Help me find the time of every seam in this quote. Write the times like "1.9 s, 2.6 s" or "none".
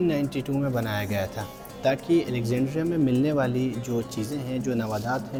none

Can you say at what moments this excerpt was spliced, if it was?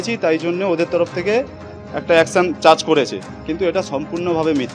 none

